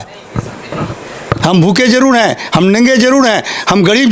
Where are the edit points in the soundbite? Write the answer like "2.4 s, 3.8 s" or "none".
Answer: none